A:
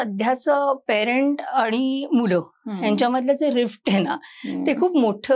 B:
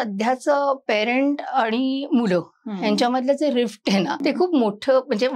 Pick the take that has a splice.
B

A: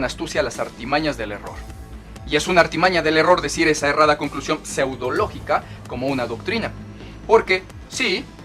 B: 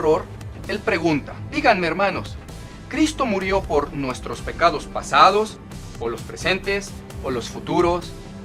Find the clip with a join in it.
B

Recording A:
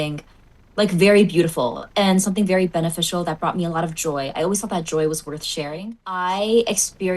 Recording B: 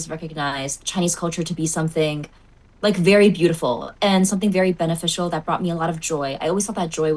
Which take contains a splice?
A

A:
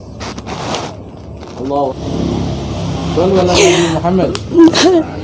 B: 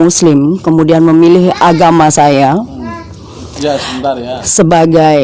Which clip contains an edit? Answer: A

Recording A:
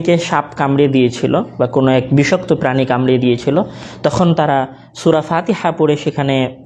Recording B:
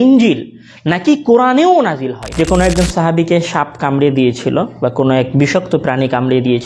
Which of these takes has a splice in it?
B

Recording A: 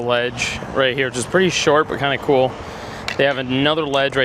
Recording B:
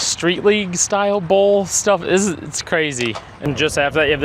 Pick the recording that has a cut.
B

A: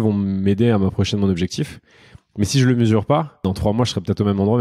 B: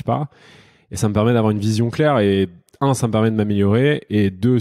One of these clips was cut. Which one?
A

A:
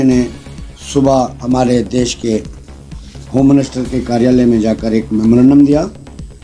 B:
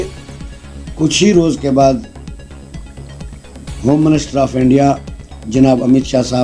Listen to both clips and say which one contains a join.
B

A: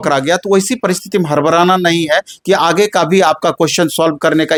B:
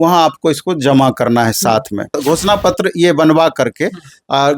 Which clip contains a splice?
B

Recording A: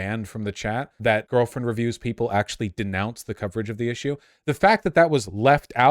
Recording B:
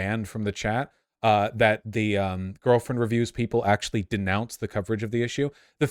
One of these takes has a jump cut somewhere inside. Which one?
A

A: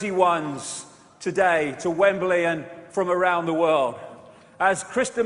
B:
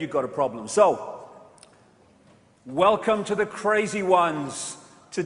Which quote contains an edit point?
B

